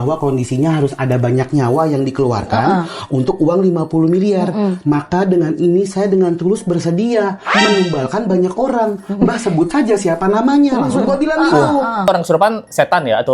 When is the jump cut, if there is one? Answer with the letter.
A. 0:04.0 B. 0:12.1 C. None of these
B